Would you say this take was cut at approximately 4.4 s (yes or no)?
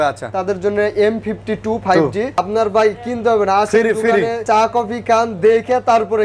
yes